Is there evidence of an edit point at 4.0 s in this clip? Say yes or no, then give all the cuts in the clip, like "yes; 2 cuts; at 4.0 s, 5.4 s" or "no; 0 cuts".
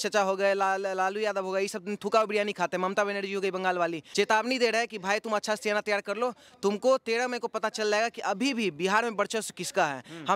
yes; 1 cut; at 4.0 s